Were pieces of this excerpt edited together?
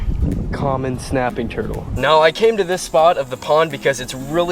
yes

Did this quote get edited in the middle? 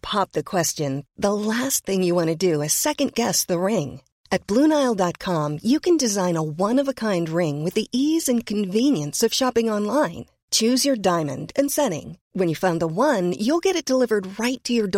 no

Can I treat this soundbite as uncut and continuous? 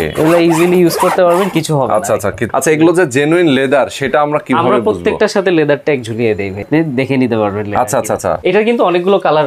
no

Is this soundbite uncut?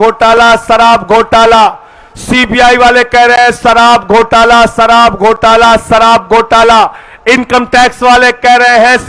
yes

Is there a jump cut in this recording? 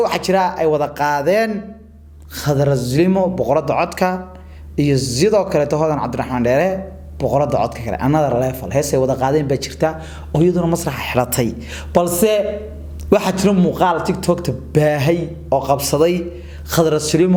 no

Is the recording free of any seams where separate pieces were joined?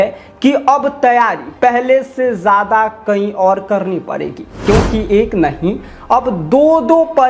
yes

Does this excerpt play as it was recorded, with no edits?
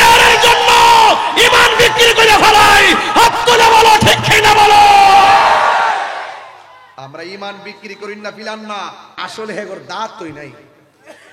no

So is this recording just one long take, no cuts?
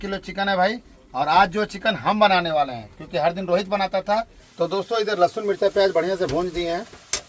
no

